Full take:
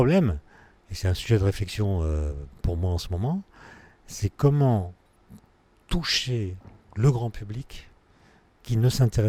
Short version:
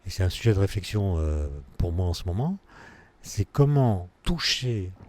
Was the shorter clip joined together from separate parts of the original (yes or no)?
yes